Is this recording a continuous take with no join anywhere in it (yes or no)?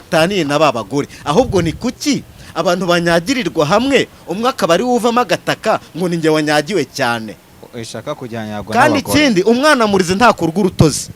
yes